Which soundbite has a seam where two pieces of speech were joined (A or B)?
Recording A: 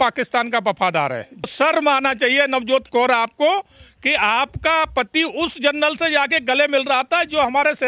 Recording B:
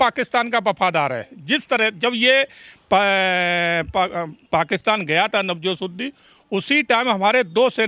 A